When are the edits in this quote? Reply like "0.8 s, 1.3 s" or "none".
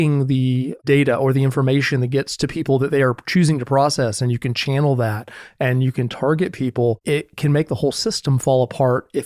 0.8 s, 7.0 s